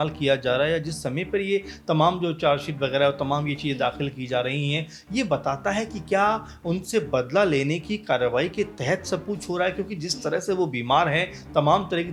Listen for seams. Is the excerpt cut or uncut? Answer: uncut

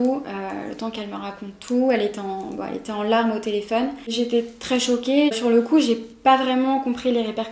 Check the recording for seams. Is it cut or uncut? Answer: cut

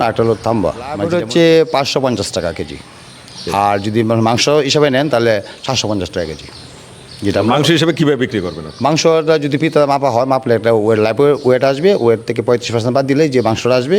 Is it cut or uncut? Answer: cut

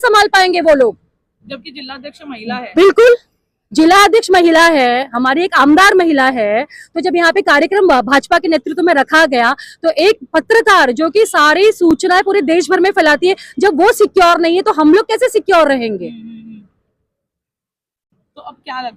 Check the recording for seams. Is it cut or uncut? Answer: uncut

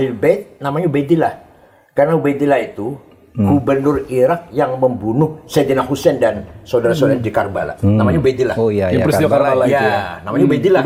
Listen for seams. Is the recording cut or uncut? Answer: uncut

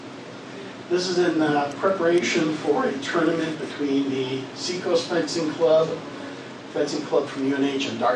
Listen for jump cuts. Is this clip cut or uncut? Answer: cut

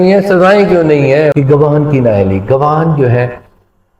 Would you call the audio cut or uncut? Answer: cut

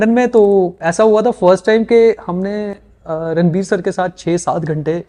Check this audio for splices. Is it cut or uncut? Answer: uncut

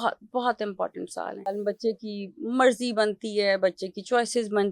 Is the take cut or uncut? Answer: cut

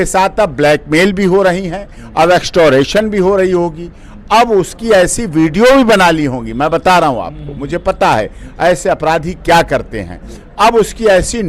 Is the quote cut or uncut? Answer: uncut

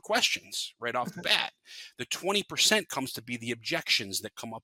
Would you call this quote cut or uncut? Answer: uncut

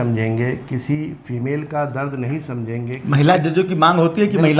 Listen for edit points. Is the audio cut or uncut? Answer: uncut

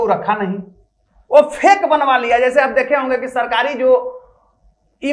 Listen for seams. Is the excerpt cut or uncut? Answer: uncut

